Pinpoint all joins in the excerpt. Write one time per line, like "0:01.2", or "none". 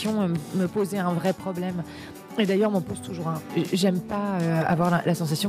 0:03.5